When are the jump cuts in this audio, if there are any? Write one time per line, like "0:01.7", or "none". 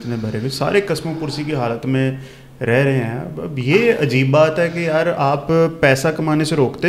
none

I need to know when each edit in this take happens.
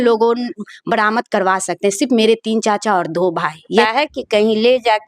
0:03.8

